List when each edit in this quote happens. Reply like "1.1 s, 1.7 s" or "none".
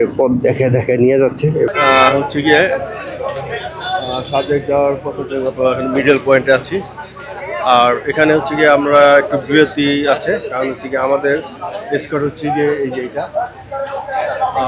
1.7 s

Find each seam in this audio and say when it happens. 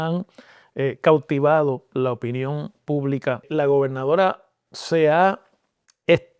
3.5 s

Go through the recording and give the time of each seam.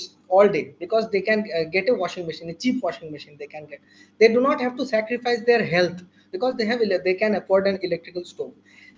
6.1 s

